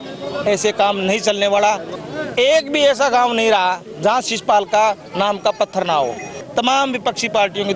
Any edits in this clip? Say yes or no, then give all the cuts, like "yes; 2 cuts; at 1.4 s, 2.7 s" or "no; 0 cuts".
yes; 2 cuts; at 1.9 s, 6.4 s